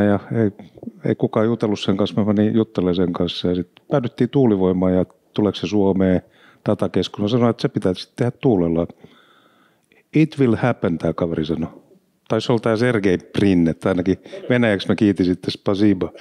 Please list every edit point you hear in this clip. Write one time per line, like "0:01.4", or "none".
none